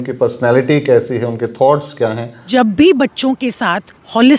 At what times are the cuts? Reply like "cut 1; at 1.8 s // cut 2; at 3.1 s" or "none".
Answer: cut 1; at 2.5 s